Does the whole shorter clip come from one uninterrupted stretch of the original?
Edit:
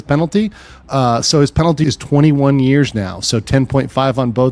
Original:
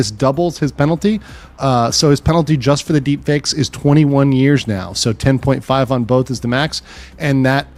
no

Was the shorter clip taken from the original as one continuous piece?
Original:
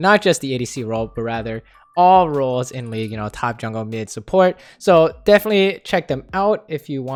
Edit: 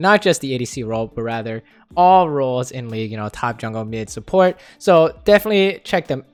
yes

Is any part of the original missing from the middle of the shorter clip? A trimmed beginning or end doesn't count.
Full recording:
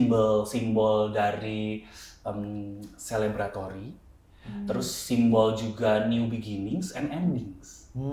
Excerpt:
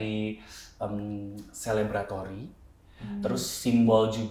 no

